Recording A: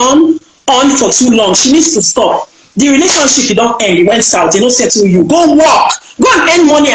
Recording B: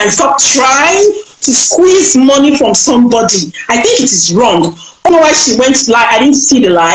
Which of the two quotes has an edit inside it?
B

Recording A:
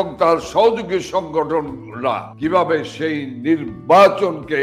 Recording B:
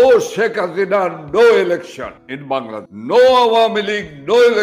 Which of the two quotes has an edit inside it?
B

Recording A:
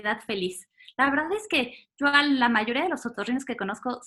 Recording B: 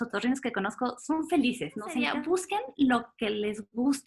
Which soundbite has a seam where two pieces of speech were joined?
B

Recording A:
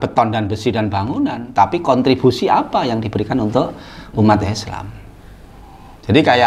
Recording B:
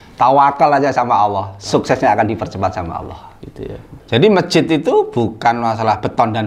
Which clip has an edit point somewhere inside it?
B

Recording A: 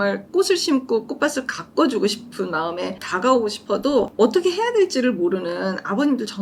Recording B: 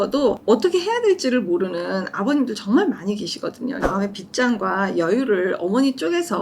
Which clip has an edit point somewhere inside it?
B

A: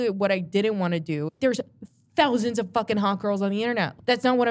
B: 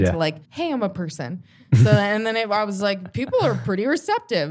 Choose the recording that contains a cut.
A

